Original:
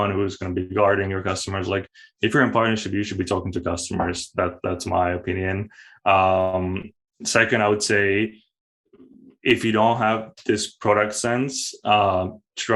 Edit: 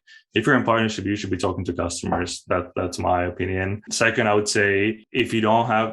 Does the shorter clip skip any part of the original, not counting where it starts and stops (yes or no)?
yes